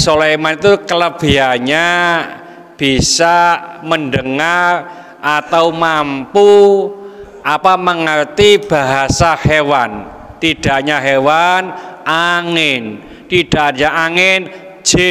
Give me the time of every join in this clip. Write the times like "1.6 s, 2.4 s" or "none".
none